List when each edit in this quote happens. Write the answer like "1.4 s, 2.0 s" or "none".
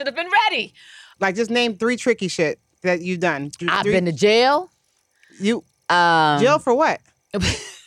1.1 s